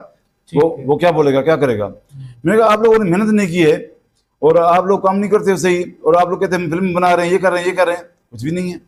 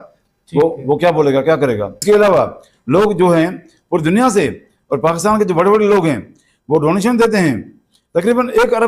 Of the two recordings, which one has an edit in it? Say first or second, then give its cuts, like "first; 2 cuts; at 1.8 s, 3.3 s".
second; 1 cut; at 1.9 s